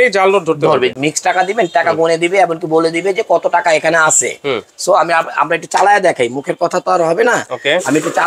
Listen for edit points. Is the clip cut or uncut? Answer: cut